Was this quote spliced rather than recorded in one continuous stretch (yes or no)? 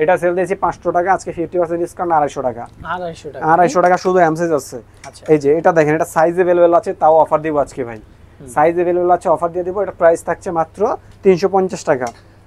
no